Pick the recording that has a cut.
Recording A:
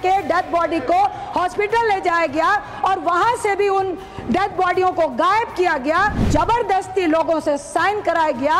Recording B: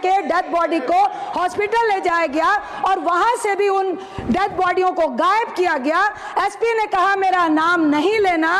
A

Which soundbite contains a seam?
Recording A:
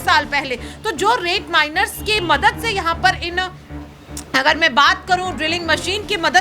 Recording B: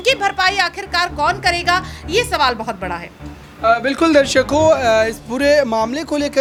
A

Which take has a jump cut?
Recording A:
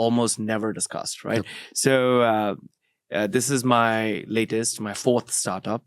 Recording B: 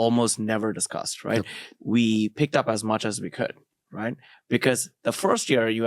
B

